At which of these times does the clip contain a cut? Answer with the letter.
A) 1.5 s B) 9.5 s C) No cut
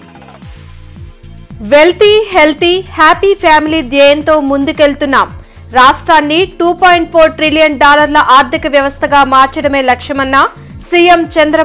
A